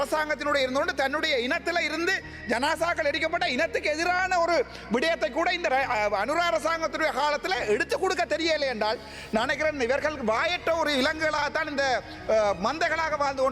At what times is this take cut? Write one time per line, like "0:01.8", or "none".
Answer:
none